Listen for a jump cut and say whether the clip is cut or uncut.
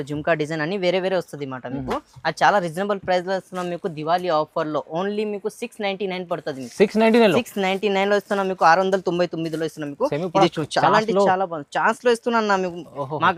uncut